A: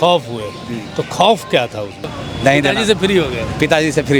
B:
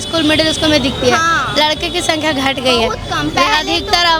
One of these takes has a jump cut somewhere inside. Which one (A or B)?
A